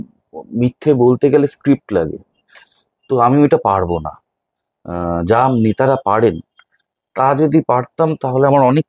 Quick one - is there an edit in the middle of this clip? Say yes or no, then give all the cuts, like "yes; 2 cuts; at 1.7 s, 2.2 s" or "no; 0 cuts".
no; 0 cuts